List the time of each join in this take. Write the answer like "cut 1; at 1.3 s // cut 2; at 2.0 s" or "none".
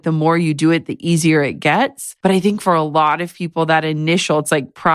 cut 1; at 2.0 s

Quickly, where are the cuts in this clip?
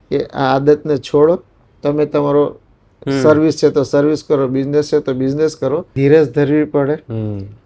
cut 1; at 5.9 s

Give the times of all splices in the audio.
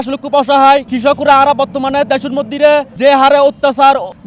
cut 1; at 0.9 s

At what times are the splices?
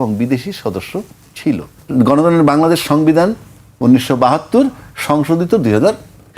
cut 1; at 1.7 s

